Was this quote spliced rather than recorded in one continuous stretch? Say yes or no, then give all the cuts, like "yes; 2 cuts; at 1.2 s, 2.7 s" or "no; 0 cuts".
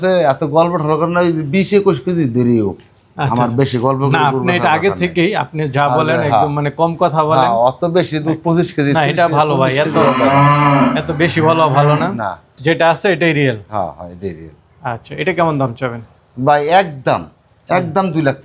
no; 0 cuts